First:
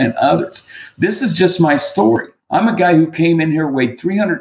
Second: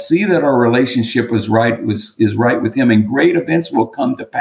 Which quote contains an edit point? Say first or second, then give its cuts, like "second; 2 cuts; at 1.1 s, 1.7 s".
first; 1 cut; at 2.4 s